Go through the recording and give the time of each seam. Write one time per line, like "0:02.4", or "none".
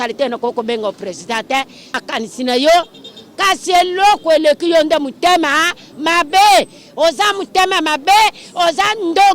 0:01.9